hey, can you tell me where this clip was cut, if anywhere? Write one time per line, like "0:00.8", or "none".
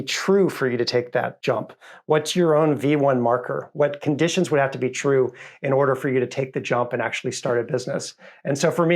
0:01.3